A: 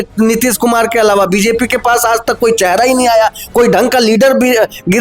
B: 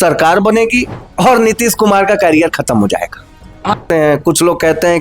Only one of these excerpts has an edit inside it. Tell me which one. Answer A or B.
B